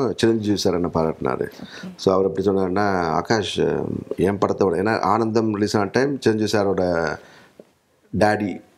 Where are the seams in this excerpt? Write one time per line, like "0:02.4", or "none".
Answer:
none